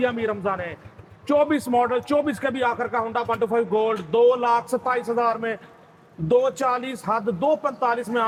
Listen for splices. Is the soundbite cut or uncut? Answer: uncut